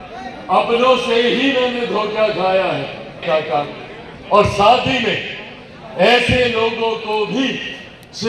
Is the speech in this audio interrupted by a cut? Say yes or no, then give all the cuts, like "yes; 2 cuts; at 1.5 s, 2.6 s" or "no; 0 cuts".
yes; 1 cut; at 3.2 s